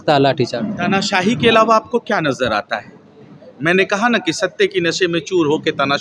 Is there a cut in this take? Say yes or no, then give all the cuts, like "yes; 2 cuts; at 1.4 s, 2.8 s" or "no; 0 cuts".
no; 0 cuts